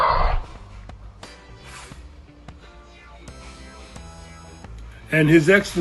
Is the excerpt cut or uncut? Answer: cut